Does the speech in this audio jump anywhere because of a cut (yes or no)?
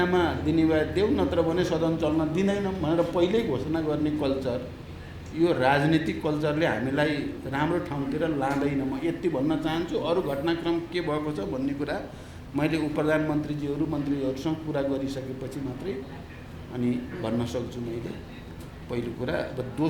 no